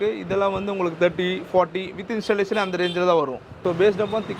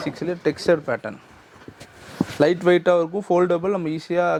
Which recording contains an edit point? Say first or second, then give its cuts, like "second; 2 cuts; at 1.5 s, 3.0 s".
first; 1 cut; at 3.5 s